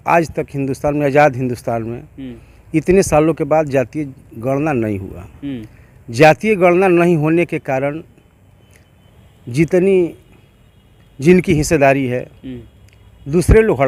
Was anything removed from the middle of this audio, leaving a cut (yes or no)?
no